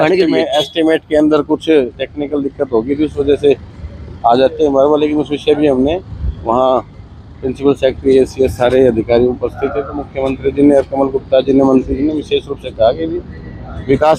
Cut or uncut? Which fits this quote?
uncut